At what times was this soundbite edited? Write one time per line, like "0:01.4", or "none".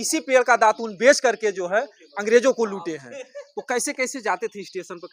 none